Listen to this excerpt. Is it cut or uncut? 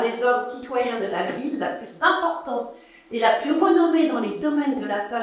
uncut